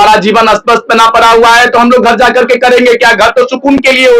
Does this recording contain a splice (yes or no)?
no